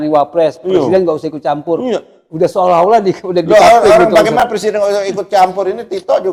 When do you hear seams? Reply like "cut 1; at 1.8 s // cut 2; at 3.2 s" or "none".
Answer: none

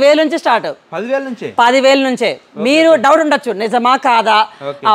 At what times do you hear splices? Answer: none

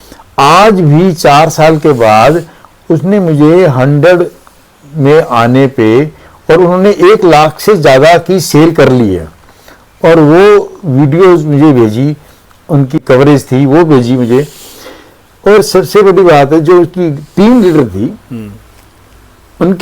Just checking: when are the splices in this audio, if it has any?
cut 1; at 13.0 s

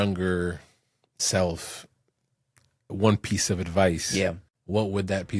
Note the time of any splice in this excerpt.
cut 1; at 4.2 s

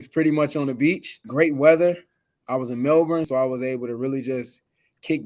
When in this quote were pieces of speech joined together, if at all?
cut 1; at 1.2 s // cut 2; at 3.3 s

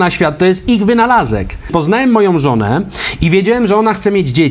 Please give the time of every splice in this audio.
cut 1; at 1.7 s

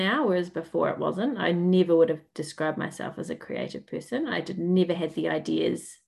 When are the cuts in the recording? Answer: none

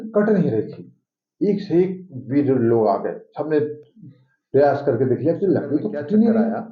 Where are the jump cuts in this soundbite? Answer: none

